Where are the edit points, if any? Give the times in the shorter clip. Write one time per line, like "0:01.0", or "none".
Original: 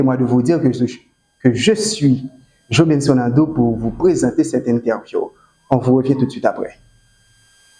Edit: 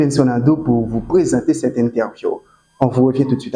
none